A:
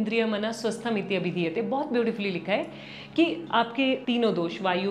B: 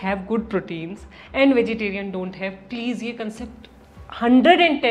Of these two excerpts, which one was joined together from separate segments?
A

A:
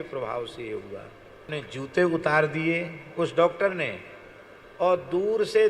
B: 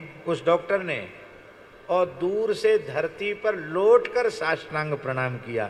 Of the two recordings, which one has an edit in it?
A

